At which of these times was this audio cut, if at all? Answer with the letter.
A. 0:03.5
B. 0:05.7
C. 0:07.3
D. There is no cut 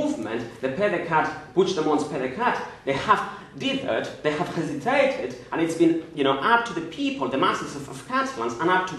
D